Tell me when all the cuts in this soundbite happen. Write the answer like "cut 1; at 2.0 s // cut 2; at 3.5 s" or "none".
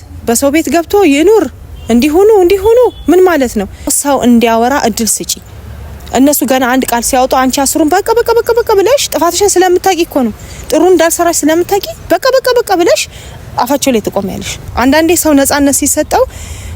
cut 1; at 4.0 s // cut 2; at 14.6 s